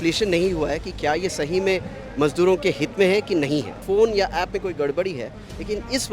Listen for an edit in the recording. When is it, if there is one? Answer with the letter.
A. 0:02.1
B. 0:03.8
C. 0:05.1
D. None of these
B